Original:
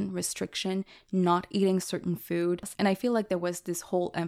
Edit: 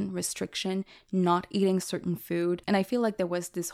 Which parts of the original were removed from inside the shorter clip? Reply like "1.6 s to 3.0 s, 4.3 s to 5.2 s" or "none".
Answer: 2.6 s to 2.7 s